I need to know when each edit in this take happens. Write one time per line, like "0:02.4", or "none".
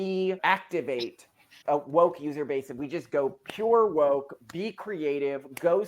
0:01.5